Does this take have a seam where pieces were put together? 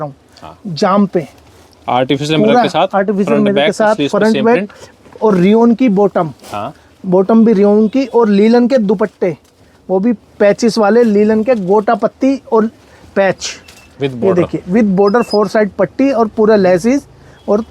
no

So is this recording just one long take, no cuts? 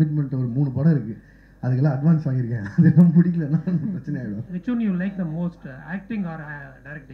no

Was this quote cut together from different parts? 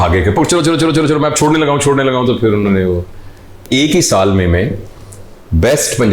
yes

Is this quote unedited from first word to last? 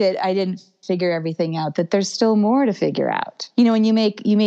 no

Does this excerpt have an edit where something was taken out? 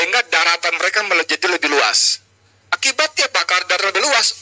no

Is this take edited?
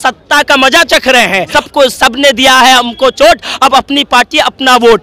yes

